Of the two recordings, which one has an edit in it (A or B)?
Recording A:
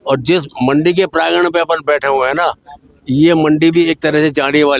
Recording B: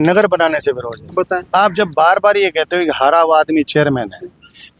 B